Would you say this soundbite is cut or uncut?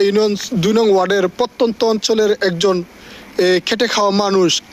uncut